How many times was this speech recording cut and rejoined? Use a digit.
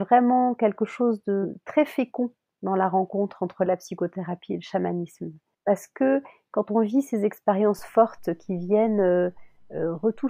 0